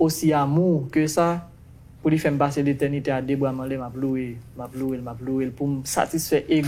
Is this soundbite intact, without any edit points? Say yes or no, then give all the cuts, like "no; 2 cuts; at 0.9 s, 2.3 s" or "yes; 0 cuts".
yes; 0 cuts